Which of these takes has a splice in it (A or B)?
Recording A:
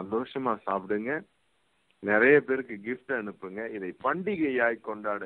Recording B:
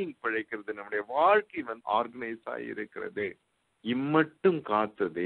B